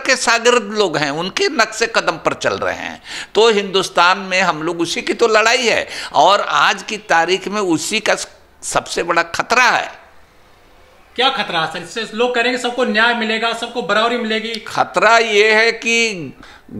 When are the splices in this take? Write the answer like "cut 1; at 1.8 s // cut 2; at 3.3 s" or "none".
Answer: none